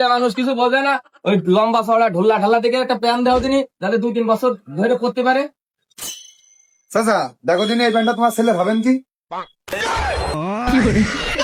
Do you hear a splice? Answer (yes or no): no